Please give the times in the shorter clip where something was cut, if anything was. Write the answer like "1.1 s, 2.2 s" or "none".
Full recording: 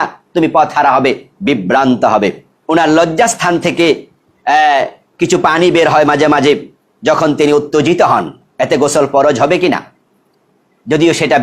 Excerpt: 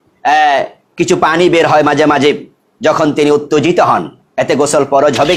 none